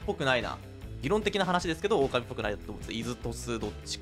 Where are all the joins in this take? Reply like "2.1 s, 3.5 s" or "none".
0.9 s